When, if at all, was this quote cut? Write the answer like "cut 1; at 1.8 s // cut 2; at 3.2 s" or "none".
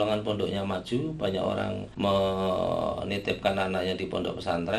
cut 1; at 1.8 s